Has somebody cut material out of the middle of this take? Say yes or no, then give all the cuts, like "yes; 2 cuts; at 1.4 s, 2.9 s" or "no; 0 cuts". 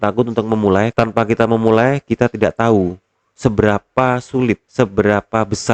yes; 2 cuts; at 0.9 s, 4.7 s